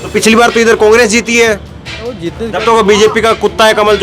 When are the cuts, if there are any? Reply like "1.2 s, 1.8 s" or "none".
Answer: none